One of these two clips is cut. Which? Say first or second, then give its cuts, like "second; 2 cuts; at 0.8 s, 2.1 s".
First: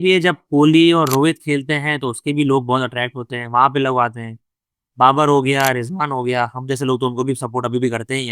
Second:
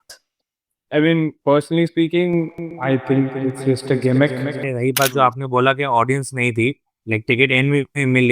second; 1 cut; at 4.6 s